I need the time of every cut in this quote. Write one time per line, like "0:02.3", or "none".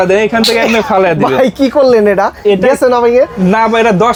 none